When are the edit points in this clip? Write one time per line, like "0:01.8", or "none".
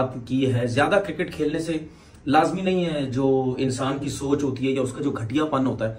none